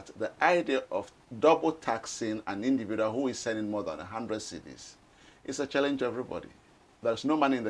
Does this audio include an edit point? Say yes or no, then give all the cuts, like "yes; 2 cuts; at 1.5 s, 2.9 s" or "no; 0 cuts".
no; 0 cuts